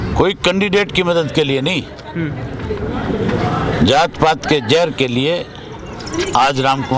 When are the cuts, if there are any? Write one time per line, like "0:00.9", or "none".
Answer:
none